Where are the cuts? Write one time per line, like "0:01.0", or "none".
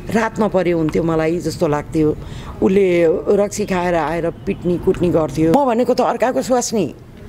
0:05.5